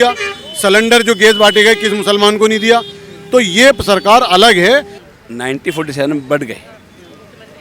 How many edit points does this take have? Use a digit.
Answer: 1